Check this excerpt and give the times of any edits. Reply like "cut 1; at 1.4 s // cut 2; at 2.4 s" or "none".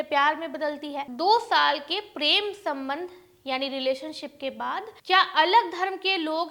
cut 1; at 1.1 s // cut 2; at 4.9 s